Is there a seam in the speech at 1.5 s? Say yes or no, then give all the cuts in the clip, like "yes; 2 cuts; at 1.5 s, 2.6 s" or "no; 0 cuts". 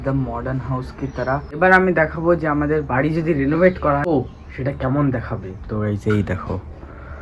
yes; 2 cuts; at 1.5 s, 4.1 s